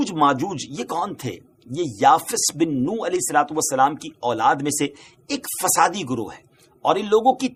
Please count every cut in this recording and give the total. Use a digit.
0